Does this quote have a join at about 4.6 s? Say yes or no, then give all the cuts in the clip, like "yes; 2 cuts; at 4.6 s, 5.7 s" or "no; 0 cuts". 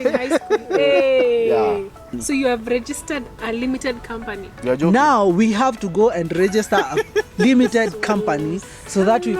no; 1 cut; at 2.1 s